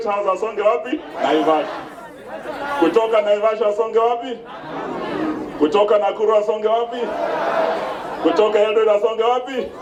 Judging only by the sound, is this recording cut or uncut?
uncut